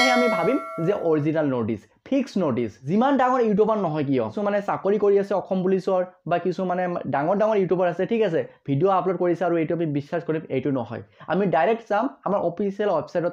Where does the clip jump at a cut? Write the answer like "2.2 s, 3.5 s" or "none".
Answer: 2.8 s, 4.3 s